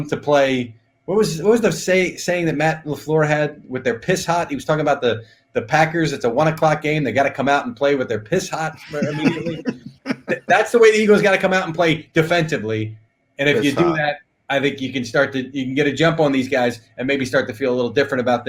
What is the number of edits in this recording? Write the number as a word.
zero